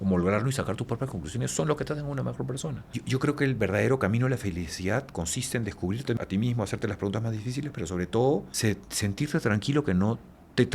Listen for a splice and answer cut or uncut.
cut